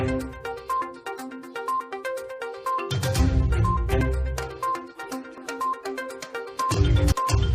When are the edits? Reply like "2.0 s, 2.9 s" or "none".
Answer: none

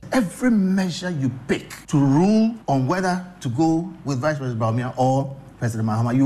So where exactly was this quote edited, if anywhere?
1.7 s, 2.6 s

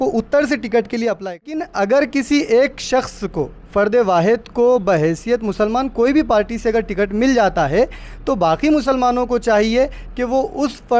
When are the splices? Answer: 1.7 s

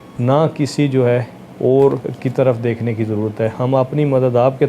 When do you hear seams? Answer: 2.1 s

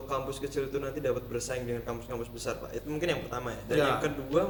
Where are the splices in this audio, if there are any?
none

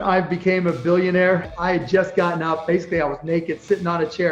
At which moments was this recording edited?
1.5 s

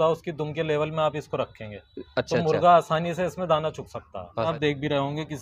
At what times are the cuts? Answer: 4.5 s

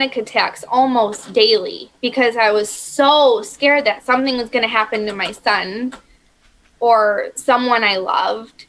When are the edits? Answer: none

